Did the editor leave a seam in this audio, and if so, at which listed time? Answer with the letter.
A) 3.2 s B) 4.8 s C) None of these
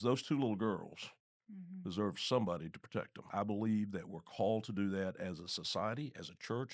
A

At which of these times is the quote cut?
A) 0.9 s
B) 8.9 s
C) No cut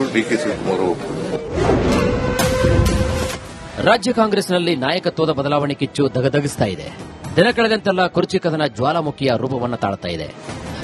A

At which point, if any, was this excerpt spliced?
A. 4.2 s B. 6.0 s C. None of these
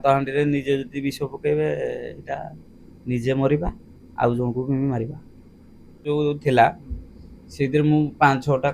B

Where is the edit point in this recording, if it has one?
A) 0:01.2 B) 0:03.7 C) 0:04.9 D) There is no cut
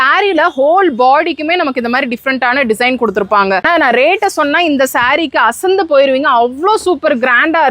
B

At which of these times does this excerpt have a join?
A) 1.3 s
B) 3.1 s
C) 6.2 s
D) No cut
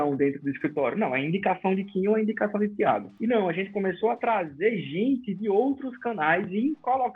B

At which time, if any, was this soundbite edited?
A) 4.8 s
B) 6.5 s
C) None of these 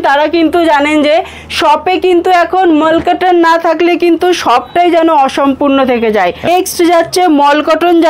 B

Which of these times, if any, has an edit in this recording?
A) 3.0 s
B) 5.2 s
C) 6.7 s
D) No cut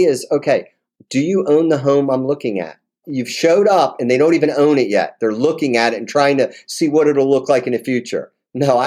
D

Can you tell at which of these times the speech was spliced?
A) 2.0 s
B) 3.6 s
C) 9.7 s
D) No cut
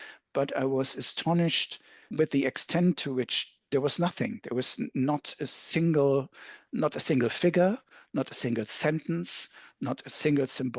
A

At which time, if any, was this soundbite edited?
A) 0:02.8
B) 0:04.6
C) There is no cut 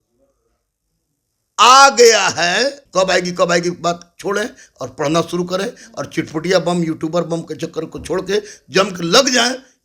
A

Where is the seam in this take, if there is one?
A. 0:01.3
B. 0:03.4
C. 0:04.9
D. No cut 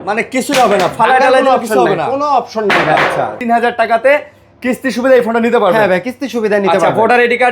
B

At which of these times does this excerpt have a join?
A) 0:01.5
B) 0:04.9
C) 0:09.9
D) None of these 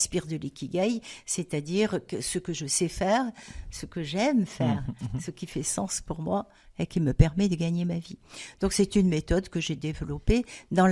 D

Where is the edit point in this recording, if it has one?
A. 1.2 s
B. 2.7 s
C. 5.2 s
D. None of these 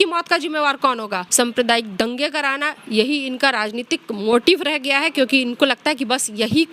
A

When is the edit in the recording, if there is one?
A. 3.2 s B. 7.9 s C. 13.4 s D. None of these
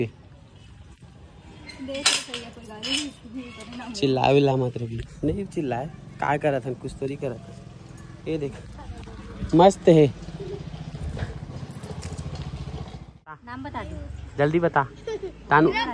C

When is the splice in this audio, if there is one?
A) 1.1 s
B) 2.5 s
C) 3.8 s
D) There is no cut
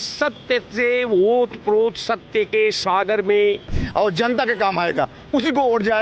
C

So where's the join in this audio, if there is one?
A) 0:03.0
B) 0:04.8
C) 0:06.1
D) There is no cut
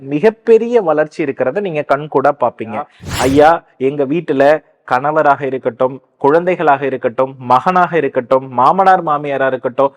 A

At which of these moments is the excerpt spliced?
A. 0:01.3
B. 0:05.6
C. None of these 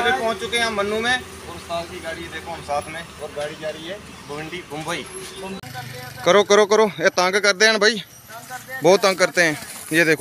B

